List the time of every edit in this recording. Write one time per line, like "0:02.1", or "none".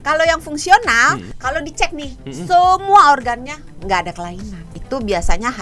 0:01.3
0:04.7